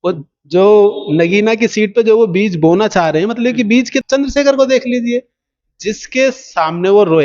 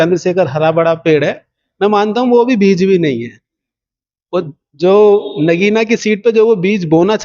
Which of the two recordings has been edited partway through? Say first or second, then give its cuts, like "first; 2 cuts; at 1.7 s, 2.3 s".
first; 1 cut; at 4.0 s